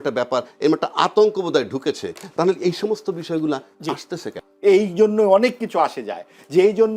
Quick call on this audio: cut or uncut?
cut